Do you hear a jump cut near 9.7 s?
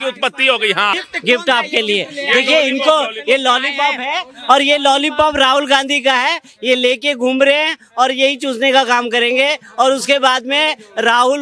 no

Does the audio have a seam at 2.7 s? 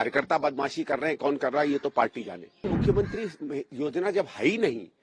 yes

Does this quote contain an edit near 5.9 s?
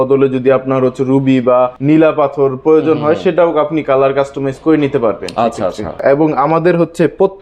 yes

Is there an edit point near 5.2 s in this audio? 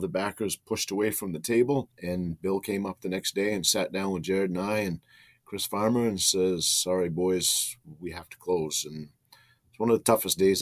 no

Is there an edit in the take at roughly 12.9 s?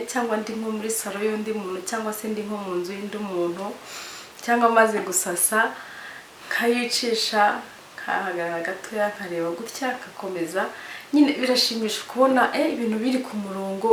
no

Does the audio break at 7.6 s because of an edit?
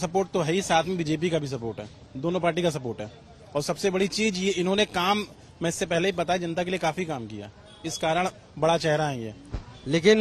no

